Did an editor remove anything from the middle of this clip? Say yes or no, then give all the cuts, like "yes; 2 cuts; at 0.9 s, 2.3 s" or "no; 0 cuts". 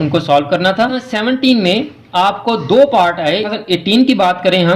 yes; 2 cuts; at 1.0 s, 3.5 s